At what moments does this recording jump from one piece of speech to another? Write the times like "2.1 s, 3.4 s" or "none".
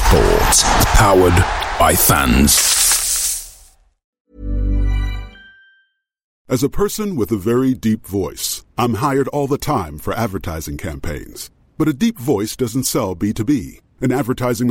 4.3 s